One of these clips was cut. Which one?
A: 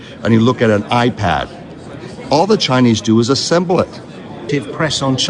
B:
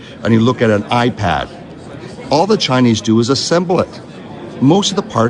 B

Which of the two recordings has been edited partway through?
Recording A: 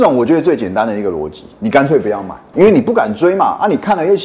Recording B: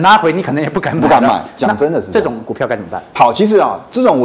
A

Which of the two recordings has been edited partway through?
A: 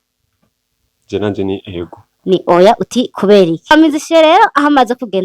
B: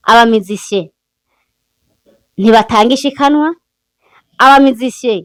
A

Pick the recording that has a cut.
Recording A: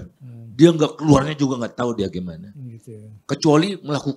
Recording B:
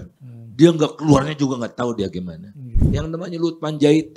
B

